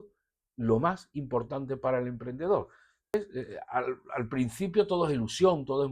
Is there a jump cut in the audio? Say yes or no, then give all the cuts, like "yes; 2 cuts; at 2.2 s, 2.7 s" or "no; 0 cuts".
yes; 1 cut; at 3.1 s